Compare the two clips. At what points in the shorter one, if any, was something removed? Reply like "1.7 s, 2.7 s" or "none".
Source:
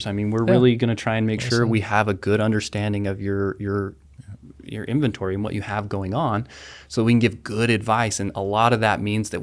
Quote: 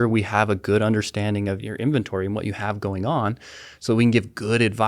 1.6 s